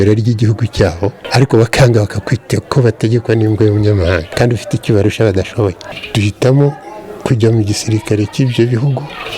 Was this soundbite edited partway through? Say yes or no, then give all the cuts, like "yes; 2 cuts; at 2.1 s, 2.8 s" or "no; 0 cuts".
yes; 3 cuts; at 1.2 s, 4.3 s, 5.9 s